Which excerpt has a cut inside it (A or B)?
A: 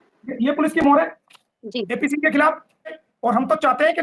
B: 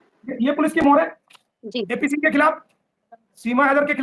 A